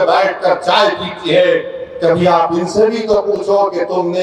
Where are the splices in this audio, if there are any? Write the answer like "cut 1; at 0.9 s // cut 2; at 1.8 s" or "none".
none